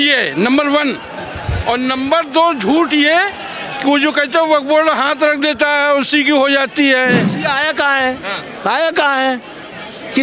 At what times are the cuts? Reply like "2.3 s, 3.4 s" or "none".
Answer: 7.3 s